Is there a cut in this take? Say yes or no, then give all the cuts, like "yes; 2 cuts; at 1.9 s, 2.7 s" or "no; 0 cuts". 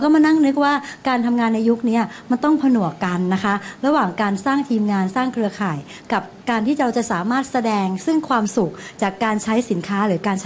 no; 0 cuts